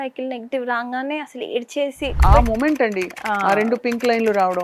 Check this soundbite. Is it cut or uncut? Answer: cut